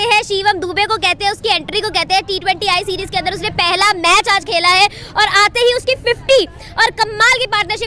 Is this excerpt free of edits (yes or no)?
yes